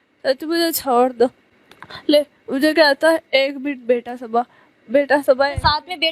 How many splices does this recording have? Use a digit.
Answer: 0